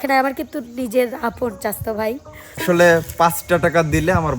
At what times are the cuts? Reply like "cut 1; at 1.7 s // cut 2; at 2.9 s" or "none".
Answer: cut 1; at 2.6 s